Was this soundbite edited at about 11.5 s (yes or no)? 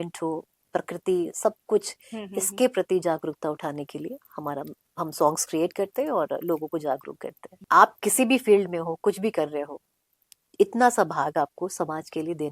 no